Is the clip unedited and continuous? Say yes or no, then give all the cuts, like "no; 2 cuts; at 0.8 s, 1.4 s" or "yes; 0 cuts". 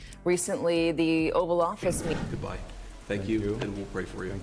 no; 1 cut; at 2.2 s